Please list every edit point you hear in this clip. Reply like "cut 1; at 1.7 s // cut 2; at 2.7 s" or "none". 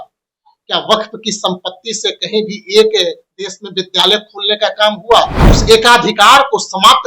cut 1; at 5.5 s